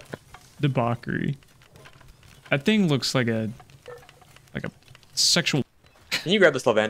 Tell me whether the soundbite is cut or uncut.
cut